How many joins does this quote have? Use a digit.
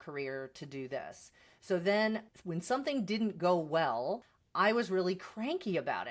1